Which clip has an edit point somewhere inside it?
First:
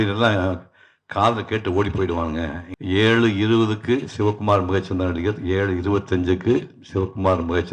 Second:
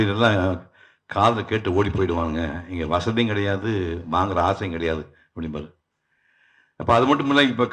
first; 1 cut; at 2.6 s

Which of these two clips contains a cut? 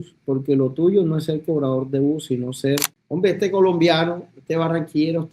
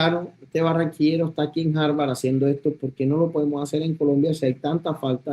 first; 1 cut; at 3.0 s

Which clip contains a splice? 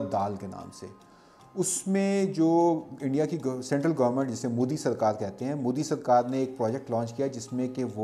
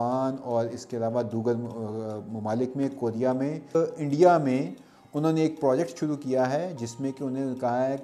second; 1 cut; at 3.8 s

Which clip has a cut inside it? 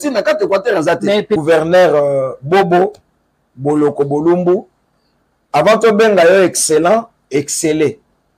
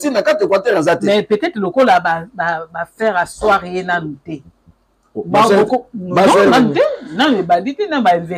first; 1 cut; at 1.4 s

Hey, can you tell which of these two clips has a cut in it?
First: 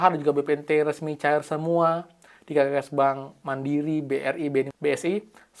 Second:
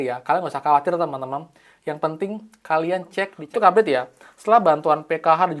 second; 1 cut; at 3.4 s

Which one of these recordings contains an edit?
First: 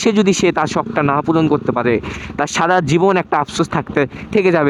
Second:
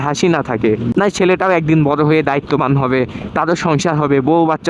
second; 1 cut; at 0.9 s

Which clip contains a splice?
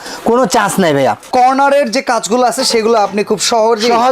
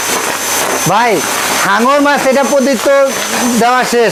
first; 1 cut; at 1.2 s

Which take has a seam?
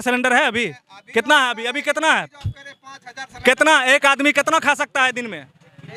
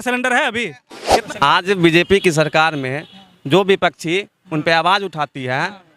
second; 1 cut; at 1.1 s

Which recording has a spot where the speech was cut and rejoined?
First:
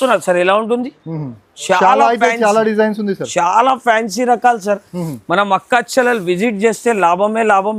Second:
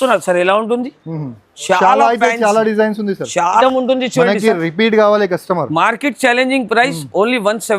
second; 1 cut; at 3.6 s

